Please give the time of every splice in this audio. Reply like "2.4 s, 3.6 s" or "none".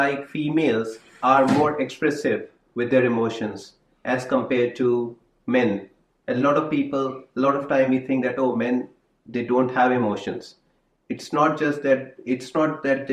none